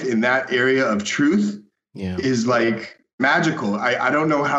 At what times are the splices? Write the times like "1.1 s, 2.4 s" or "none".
3.2 s